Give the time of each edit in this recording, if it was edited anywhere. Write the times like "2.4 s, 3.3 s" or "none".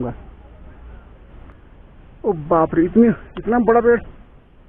1.2 s